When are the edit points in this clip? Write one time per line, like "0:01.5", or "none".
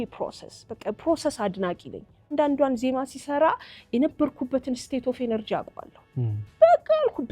0:02.3

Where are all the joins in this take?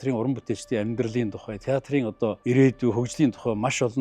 0:02.4

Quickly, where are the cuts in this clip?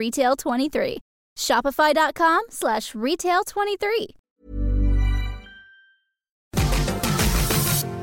0:06.5

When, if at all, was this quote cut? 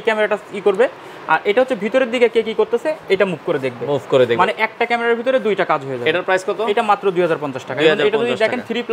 none

